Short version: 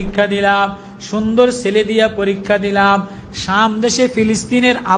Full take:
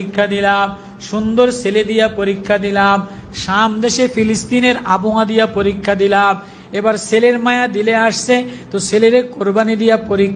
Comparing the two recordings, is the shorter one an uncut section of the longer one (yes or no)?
yes